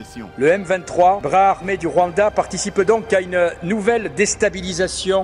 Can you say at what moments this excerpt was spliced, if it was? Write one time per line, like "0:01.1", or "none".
none